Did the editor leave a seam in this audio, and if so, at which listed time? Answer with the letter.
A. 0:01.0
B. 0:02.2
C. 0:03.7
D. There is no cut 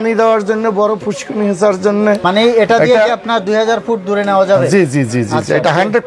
B